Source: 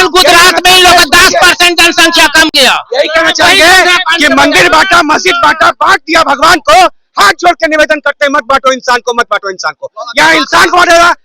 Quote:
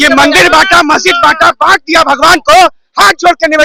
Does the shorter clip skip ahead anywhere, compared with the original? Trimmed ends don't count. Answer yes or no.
no